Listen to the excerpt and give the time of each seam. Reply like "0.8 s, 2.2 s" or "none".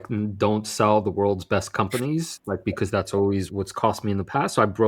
3.5 s